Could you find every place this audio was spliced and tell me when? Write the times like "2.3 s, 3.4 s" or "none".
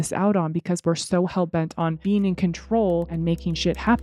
2.0 s, 3.1 s